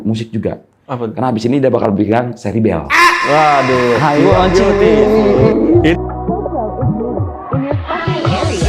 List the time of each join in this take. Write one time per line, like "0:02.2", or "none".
none